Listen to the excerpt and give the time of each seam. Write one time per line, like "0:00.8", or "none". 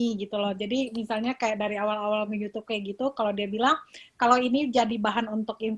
none